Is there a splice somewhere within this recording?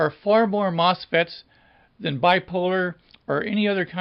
yes; 1 cut; at 3.0 s

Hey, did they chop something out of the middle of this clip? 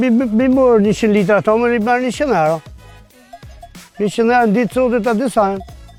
no; 0 cuts

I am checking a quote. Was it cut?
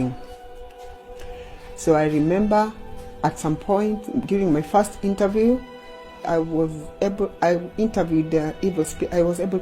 yes; 1 cut; at 6.2 s

